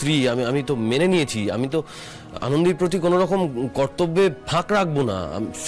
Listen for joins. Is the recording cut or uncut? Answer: uncut